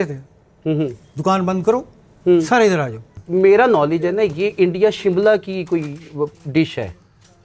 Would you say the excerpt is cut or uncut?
cut